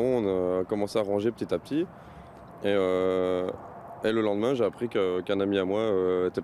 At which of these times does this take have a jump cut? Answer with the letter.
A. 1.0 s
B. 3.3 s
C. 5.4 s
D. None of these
C